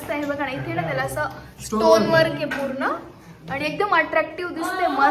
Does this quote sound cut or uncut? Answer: uncut